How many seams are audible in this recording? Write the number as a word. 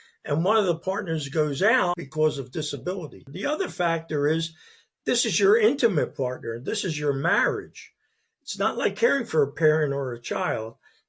two